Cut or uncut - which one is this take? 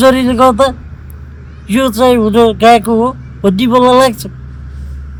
uncut